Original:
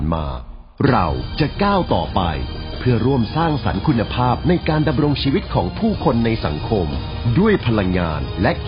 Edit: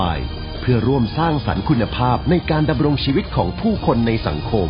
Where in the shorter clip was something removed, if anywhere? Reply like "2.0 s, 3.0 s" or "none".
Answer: none